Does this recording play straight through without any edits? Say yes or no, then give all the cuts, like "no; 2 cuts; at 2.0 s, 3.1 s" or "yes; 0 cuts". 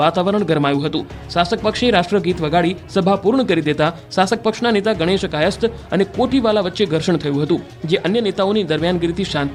yes; 0 cuts